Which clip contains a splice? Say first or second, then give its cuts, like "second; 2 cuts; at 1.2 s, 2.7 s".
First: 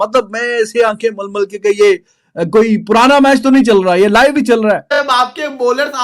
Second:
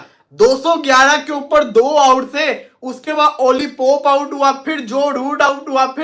first; 1 cut; at 5.0 s